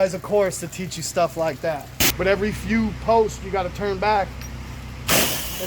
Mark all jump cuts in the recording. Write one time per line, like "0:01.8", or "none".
0:02.1